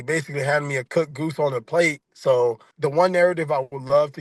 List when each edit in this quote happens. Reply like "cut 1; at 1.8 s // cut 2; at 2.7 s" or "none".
cut 1; at 2.7 s